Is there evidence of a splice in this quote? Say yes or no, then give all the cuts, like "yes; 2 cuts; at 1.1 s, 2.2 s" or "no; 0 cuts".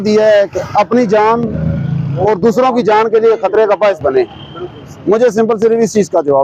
no; 0 cuts